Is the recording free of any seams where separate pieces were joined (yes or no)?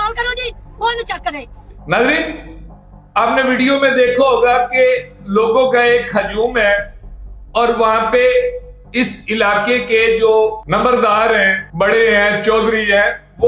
no